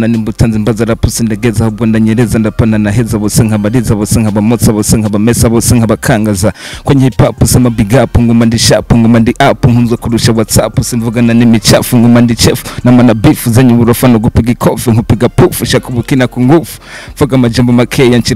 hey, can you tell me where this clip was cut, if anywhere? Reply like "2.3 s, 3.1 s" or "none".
none